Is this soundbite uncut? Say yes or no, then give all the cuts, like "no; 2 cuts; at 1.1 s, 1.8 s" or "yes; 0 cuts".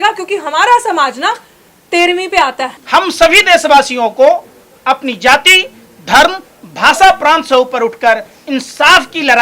no; 1 cut; at 2.7 s